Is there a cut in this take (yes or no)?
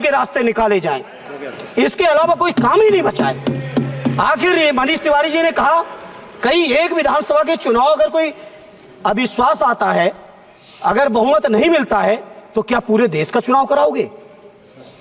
no